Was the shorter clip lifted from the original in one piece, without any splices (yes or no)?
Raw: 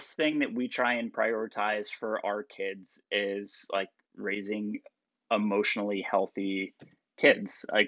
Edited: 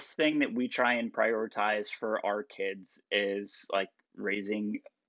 yes